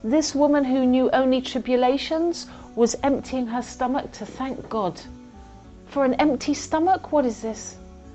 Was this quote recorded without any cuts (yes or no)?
yes